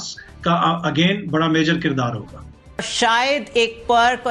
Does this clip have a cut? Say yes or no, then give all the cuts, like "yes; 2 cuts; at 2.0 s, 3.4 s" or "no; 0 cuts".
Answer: yes; 1 cut; at 2.8 s